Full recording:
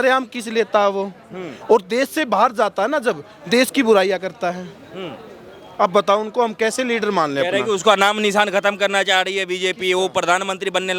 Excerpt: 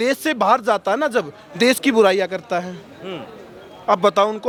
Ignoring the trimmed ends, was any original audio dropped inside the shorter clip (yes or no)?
no